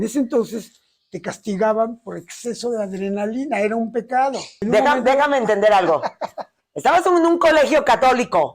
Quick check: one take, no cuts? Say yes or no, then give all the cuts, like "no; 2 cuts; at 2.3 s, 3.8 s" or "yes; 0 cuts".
no; 1 cut; at 4.5 s